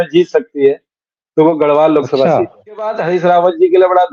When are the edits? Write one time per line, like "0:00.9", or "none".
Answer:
0:03.0